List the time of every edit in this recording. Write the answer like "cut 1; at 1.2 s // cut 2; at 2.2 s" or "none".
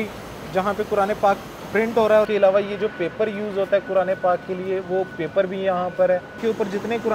cut 1; at 2.3 s // cut 2; at 6.3 s